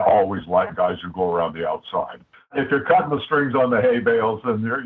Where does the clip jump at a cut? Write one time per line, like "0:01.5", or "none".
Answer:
0:02.5